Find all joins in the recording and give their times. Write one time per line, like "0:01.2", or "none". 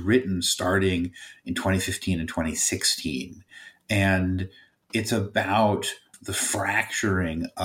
0:06.1